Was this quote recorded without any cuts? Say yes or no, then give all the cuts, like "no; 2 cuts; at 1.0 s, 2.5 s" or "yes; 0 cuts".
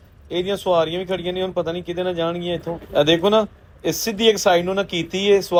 yes; 0 cuts